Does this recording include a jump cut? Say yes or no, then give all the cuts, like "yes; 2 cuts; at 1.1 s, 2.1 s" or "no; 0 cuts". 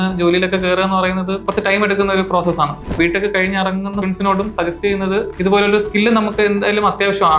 yes; 4 cuts; at 1.4 s, 2.9 s, 4.0 s, 5.3 s